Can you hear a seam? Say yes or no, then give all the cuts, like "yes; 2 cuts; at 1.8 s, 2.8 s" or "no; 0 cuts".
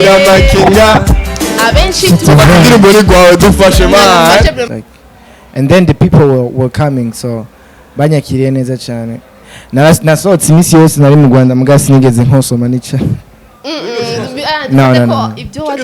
yes; 1 cut; at 4.7 s